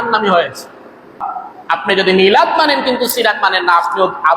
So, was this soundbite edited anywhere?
yes; 1 cut; at 1.2 s

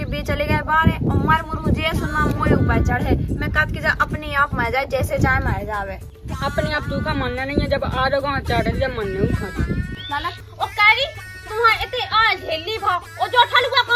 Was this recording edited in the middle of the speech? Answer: yes; 1 cut; at 10.4 s

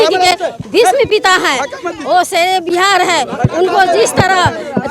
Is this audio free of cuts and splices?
yes; 0 cuts

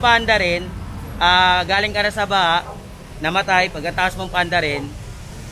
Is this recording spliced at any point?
no; 0 cuts

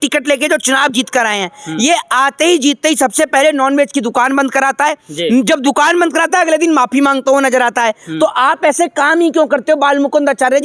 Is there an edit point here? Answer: no; 0 cuts

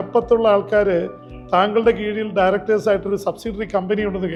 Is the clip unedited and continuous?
yes; 0 cuts

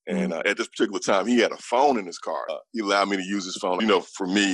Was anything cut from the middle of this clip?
yes; 2 cuts; at 2.6 s, 3.8 s

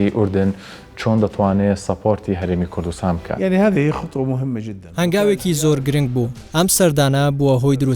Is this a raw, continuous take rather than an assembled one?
no; 3 cuts; at 3.3 s, 4.8 s, 6.4 s

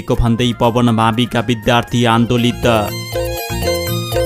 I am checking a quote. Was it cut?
yes; 1 cut; at 3.0 s

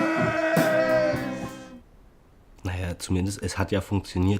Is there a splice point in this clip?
yes; 1 cut; at 1.2 s

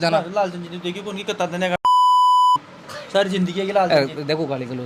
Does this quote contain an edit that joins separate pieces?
no; 0 cuts

